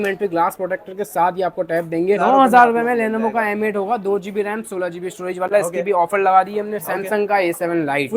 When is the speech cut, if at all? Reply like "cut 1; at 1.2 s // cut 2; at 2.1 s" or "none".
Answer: cut 1; at 2.2 s // cut 2; at 6.8 s